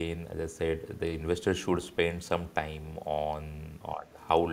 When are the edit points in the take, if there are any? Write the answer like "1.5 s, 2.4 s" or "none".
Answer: 3.6 s